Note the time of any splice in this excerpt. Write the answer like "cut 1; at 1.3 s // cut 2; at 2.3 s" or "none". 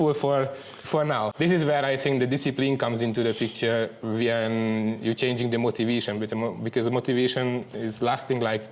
cut 1; at 1.3 s